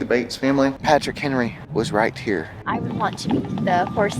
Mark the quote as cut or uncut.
cut